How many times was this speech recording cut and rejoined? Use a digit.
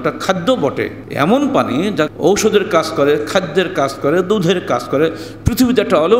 2